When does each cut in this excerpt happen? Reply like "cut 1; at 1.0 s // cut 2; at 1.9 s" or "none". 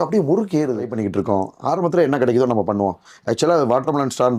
cut 1; at 0.9 s